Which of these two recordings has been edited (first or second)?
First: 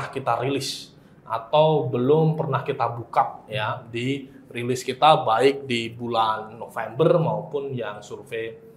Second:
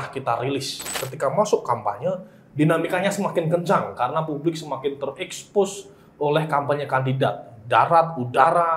second